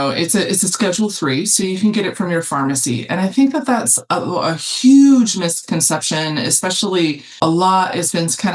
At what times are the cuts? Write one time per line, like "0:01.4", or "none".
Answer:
0:07.4